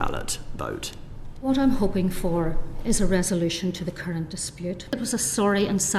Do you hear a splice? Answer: yes; 1 cut; at 4.9 s

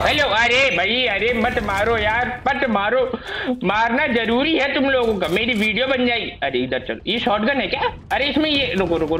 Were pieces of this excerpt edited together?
yes; 1 cut; at 8.0 s

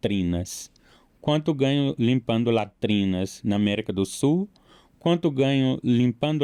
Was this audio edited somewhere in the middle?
no; 0 cuts

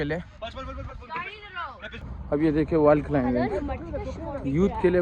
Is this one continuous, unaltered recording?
no; 1 cut; at 1.8 s

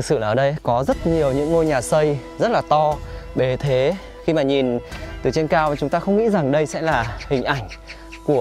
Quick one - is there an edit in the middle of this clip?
no; 0 cuts

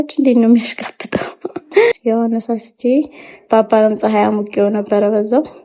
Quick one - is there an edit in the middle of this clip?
yes; 1 cut; at 2.0 s

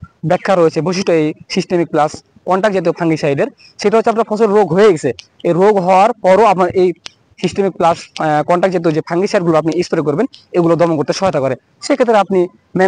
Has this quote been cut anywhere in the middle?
no; 0 cuts

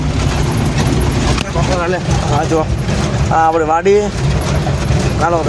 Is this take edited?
no; 0 cuts

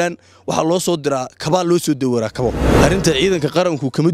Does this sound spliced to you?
yes; 1 cut; at 2.7 s

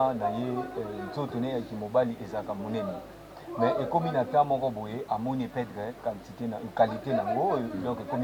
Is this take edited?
no; 0 cuts

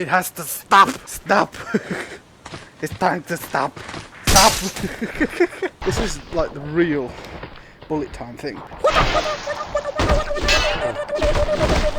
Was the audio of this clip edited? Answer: yes; 2 cuts; at 1.1 s, 5.8 s

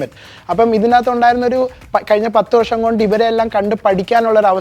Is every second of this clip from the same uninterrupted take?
yes; 0 cuts

